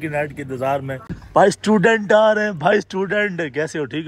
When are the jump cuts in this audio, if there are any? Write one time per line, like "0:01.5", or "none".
0:01.2